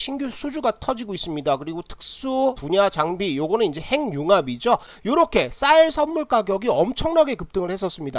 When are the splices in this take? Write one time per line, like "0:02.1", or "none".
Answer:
0:04.9

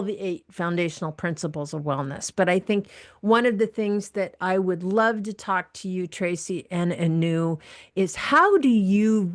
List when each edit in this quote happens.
none

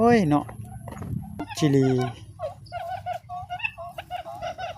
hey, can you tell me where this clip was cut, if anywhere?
0:01.5

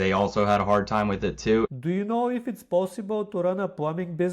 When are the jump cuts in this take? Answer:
0:01.7

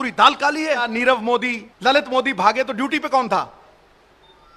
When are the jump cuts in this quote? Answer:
0:00.9
0:01.7

